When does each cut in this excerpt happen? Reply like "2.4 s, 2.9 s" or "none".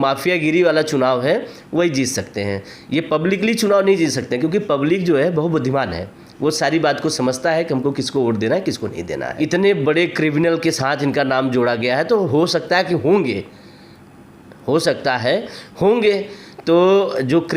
9.3 s